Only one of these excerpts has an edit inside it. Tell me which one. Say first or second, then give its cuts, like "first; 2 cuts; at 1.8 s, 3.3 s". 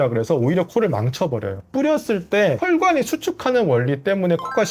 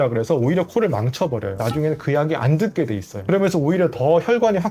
second; 1 cut; at 1.6 s